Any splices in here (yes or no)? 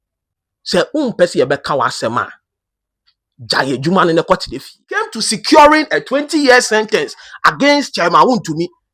yes